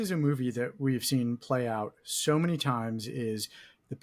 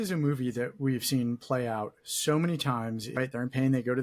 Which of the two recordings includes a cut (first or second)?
second